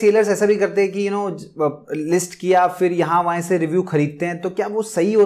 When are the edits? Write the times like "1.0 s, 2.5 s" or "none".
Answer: none